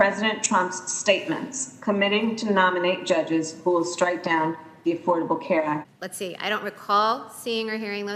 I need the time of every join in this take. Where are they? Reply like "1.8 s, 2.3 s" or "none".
5.8 s

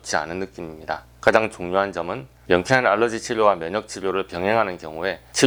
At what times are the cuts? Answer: none

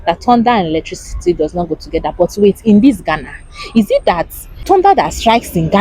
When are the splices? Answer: 4.6 s

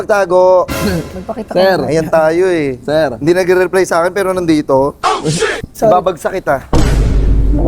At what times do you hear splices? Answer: 5.6 s

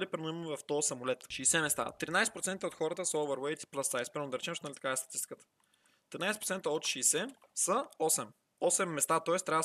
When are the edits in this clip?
none

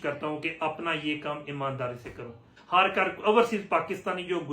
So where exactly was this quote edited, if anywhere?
2.6 s

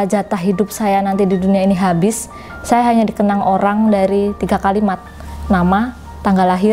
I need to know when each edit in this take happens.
none

